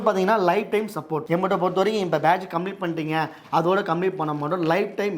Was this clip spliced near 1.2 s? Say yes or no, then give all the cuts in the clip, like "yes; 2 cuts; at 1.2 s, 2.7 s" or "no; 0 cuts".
yes; 1 cut; at 1.2 s